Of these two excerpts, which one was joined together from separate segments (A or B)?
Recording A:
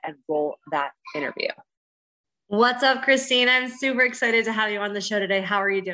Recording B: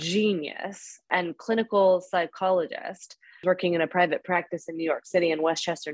B